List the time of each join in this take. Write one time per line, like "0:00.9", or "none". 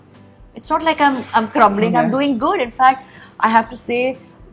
none